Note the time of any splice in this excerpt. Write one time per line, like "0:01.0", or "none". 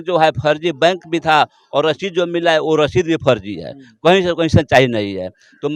none